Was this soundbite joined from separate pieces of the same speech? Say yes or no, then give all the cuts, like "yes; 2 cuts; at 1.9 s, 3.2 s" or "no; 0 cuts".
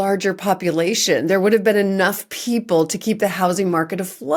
no; 0 cuts